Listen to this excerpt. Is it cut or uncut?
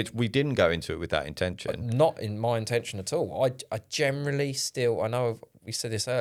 uncut